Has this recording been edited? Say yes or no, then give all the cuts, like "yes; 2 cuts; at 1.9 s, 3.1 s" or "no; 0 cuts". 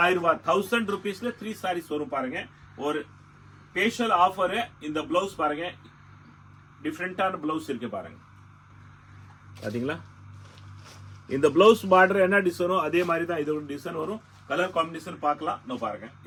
no; 0 cuts